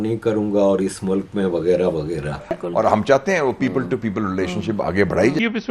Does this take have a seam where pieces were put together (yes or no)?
yes